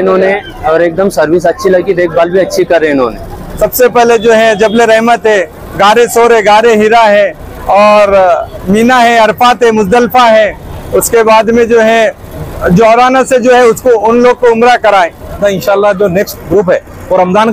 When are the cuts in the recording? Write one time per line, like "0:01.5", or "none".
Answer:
0:03.4
0:15.4